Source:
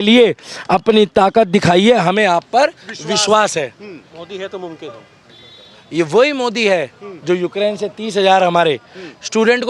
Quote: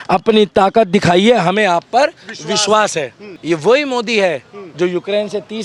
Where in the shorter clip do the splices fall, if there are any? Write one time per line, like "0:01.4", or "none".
0:03.3

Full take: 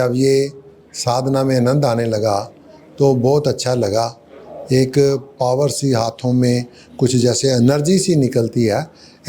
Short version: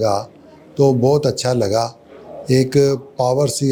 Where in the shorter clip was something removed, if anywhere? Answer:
none

